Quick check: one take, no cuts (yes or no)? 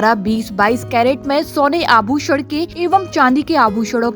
no